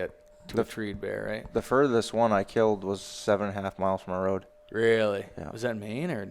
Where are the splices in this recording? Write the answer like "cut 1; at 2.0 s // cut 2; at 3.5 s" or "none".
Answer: cut 1; at 4.6 s